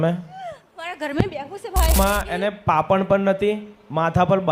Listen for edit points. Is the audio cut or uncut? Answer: cut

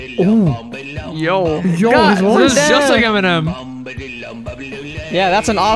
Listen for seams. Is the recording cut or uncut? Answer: uncut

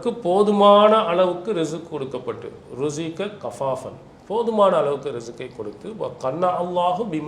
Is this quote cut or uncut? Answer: uncut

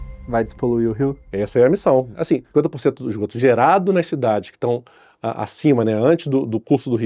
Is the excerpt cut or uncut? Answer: cut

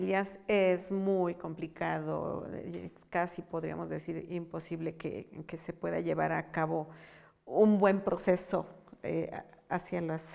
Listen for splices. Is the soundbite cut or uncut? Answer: uncut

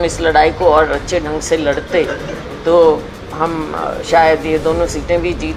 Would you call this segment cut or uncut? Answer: uncut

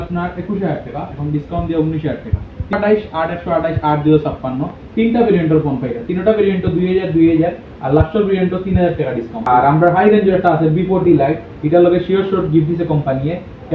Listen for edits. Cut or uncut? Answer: cut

